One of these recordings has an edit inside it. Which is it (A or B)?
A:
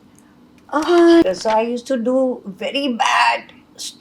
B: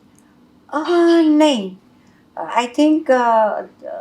A